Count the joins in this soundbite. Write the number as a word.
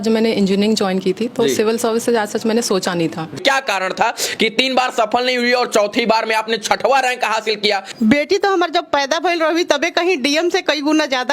two